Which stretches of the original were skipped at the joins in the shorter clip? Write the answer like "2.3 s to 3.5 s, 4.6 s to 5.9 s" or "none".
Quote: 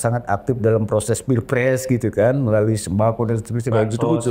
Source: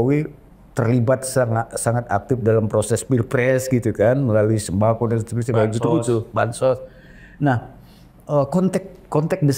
none